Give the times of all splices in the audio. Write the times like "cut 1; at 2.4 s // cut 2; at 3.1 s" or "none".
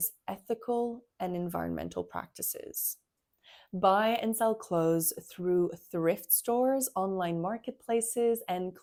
none